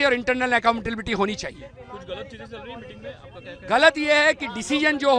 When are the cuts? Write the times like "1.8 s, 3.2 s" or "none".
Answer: none